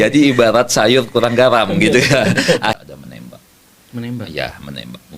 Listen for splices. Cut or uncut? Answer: cut